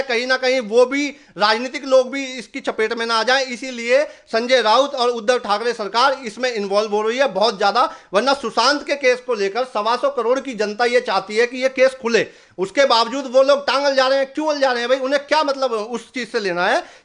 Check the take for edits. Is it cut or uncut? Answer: uncut